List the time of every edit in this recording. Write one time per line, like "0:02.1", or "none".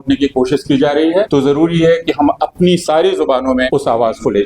0:01.3
0:03.7